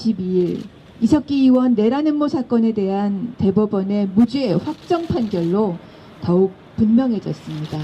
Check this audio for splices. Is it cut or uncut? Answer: uncut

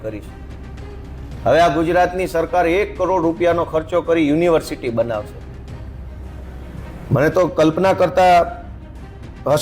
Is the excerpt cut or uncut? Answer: uncut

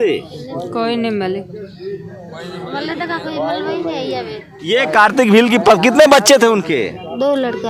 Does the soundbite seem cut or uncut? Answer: uncut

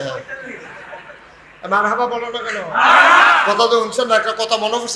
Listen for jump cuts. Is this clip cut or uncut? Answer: cut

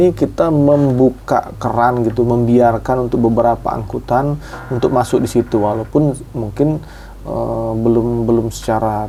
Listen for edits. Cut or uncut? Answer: uncut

